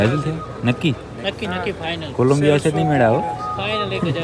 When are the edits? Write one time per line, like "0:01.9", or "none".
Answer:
none